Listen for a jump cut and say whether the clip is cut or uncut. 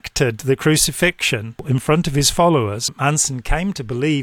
cut